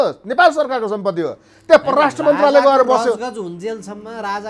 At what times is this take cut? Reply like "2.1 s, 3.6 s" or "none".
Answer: none